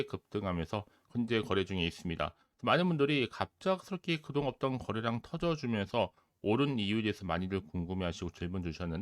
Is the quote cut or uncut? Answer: cut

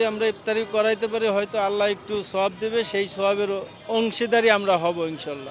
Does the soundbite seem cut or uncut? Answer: uncut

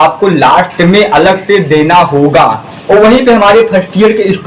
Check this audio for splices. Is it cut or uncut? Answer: cut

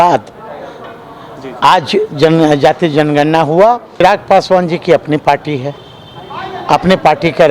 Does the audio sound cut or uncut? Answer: cut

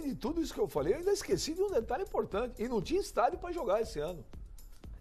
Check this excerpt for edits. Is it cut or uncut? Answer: cut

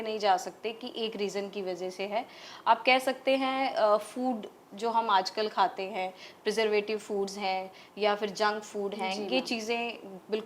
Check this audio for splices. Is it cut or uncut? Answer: uncut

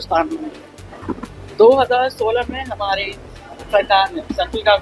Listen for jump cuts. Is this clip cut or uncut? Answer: uncut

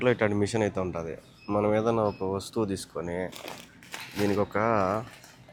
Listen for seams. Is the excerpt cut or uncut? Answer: uncut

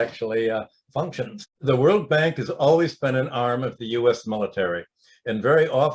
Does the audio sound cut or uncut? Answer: cut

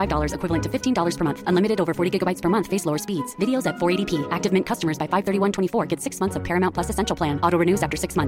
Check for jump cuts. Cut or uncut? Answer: uncut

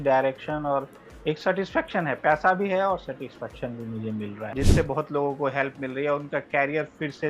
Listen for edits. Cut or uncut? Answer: cut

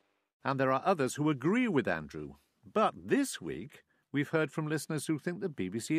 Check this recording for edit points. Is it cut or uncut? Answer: uncut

